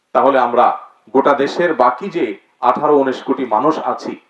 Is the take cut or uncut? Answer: uncut